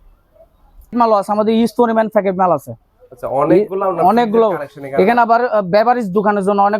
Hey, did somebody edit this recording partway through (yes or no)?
yes